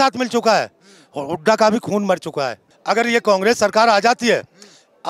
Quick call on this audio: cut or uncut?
cut